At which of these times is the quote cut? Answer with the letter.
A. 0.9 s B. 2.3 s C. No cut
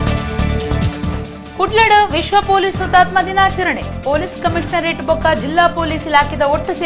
A